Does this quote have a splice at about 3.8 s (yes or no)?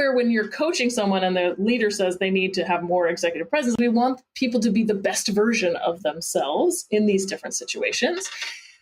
yes